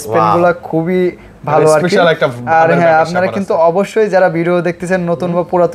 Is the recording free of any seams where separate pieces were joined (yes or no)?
yes